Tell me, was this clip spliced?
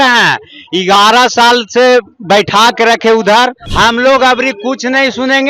yes; 1 cut; at 3.6 s

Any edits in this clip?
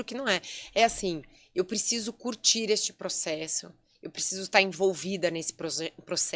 no; 0 cuts

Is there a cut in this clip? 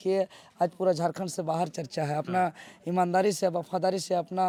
no; 0 cuts

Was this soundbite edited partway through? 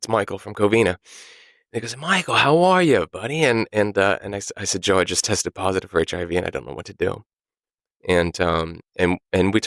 no; 0 cuts

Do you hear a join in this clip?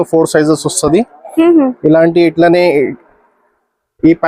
no; 0 cuts

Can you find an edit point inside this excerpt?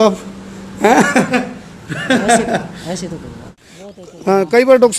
yes; 1 cut; at 3.5 s

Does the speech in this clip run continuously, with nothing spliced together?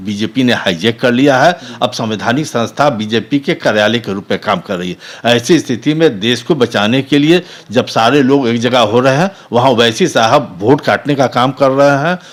yes; 0 cuts

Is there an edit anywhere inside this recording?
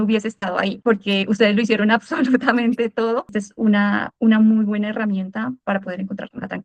yes; 1 cut; at 3.3 s

